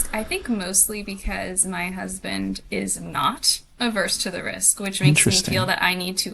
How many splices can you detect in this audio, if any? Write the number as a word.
zero